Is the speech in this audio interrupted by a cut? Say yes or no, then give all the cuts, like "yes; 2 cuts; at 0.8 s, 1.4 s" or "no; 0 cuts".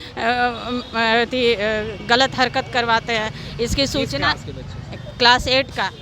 no; 0 cuts